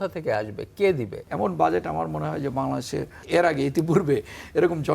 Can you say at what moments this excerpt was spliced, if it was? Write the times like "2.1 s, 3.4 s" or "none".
1.2 s, 3.2 s